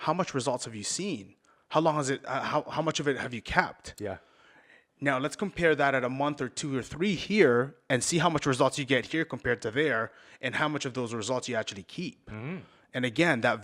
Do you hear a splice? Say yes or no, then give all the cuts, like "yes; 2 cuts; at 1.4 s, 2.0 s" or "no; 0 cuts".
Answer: no; 0 cuts